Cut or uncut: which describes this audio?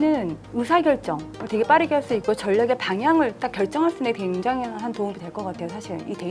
uncut